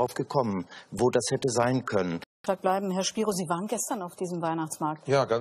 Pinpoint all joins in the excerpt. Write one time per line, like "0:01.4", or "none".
0:02.4